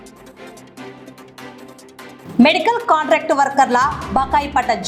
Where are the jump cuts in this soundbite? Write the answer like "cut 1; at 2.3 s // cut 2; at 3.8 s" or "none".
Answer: cut 1; at 2.2 s